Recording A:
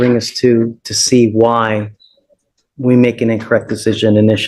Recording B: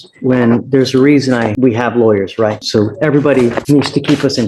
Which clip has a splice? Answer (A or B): B